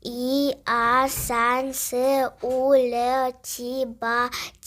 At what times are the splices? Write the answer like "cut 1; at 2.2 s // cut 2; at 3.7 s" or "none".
none